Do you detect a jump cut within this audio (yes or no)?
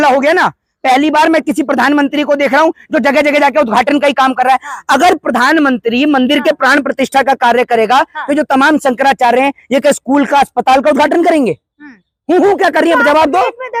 no